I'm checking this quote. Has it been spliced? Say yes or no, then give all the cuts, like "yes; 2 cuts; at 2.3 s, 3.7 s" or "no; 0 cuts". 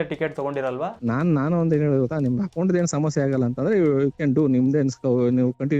yes; 1 cut; at 1.0 s